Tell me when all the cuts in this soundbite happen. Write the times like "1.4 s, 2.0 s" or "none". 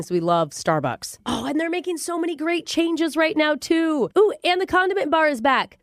none

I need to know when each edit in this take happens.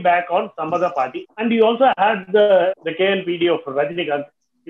1.2 s, 2.8 s

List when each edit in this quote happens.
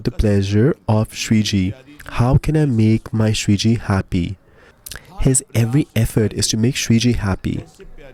none

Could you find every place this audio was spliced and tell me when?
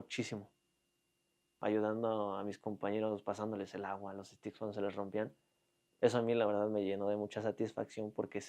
1.6 s

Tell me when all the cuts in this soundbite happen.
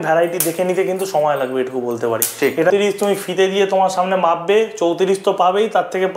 2.7 s

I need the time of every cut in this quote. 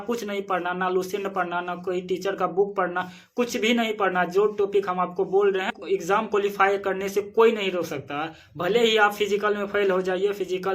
5.8 s

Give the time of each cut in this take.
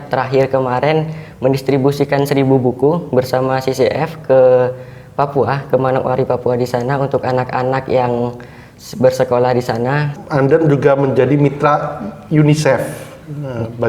10.1 s

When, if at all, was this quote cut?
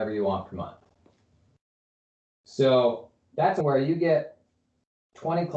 3.6 s

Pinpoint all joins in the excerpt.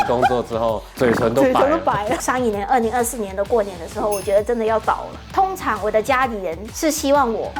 2.2 s, 5.3 s

